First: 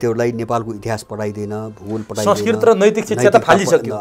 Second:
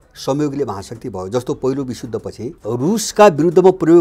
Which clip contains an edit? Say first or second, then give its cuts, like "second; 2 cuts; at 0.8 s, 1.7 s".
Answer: second; 1 cut; at 2.5 s